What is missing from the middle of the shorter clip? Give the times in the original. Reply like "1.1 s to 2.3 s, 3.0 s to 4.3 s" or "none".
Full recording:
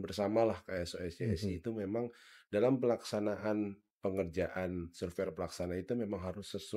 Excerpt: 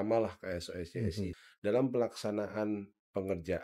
1.6 s to 2.2 s